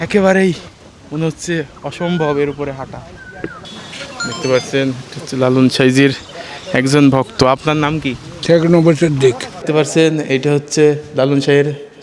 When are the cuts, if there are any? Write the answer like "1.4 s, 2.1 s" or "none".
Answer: 3.7 s, 9.5 s

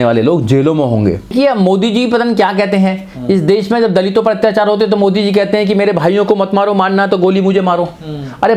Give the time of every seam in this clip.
1.3 s

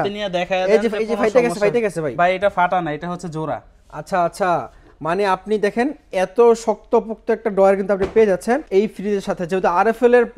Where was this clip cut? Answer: 8.6 s

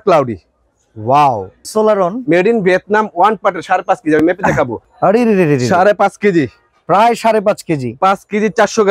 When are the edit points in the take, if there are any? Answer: 1.6 s, 4.8 s

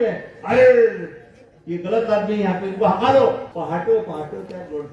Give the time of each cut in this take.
3.5 s

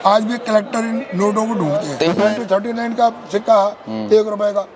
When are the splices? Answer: 2.0 s

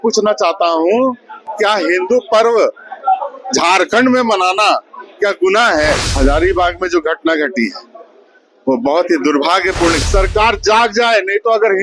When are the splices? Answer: 6.1 s, 10.0 s

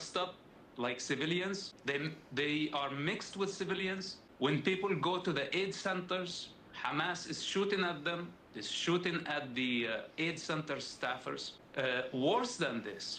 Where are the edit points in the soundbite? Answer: 1.7 s, 4.2 s, 11.6 s

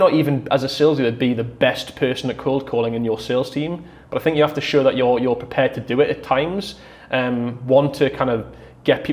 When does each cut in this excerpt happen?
none

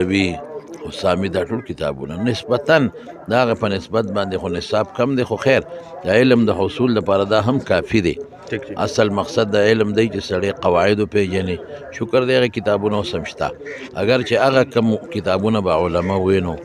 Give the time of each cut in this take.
none

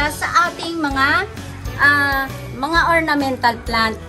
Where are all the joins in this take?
none

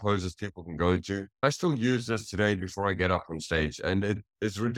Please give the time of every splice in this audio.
1.4 s

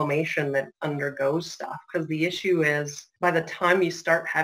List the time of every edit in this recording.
3.0 s

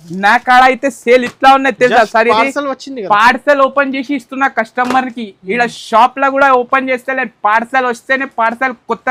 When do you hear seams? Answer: none

